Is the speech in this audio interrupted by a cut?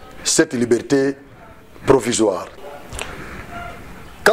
yes; 1 cut; at 2.6 s

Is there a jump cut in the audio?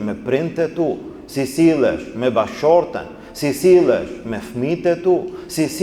no; 0 cuts

